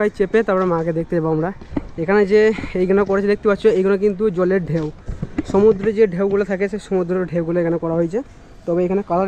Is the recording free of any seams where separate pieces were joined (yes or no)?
yes